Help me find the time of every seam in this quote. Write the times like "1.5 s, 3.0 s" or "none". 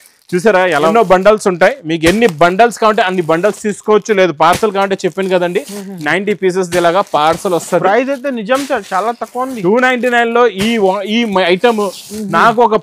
0.9 s